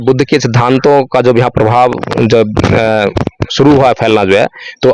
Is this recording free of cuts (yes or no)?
yes